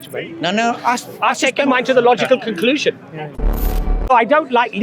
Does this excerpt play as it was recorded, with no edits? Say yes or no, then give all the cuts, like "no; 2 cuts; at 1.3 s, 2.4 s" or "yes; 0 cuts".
no; 1 cut; at 3.7 s